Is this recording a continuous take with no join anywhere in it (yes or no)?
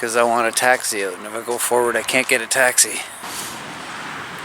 no